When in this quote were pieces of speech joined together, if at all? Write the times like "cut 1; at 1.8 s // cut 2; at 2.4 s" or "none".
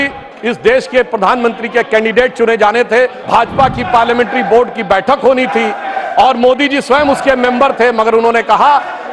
cut 1; at 3.2 s